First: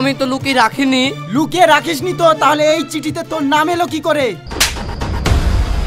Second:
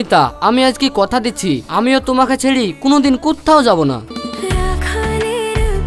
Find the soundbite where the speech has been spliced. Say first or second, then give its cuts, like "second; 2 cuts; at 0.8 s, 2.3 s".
first; 1 cut; at 4.4 s